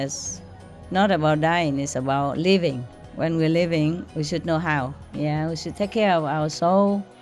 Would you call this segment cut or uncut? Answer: cut